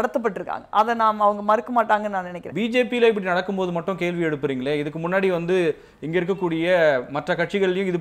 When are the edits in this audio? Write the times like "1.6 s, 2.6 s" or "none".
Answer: 2.4 s

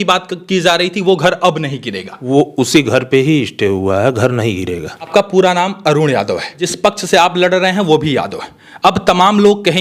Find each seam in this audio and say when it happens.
5.1 s, 6.6 s

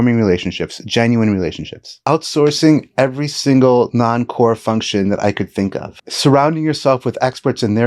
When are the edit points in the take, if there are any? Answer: 2.0 s, 6.1 s

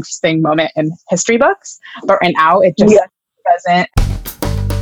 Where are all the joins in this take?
3.9 s

